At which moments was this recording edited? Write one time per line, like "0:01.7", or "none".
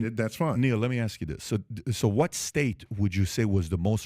0:01.7